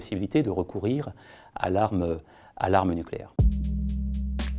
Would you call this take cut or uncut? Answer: cut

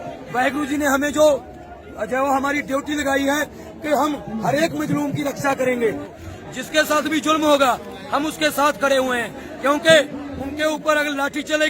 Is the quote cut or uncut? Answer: cut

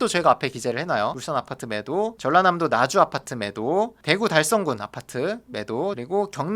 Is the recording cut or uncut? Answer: cut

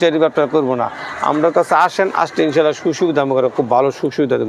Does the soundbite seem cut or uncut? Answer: uncut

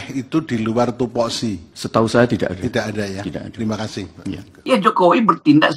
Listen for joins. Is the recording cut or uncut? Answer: cut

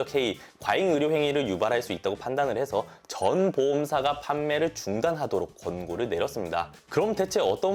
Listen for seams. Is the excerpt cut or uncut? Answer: uncut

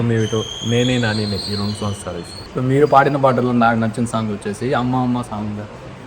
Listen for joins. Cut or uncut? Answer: cut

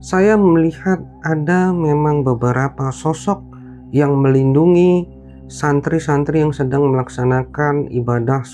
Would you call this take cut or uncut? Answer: uncut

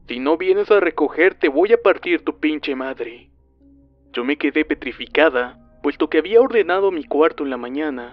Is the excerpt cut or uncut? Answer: uncut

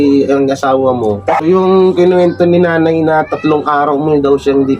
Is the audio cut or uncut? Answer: cut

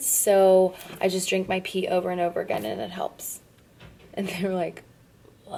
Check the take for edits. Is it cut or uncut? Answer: uncut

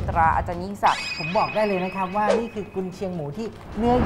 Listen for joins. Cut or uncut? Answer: cut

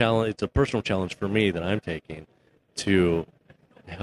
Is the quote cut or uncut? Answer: uncut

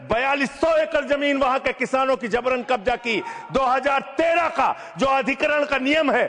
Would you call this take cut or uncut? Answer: uncut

